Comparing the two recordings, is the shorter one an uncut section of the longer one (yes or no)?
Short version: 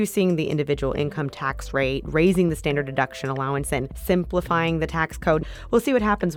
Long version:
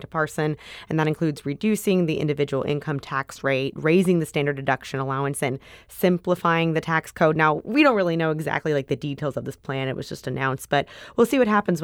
no